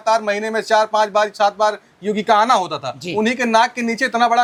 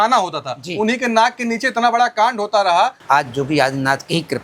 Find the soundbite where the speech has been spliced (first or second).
second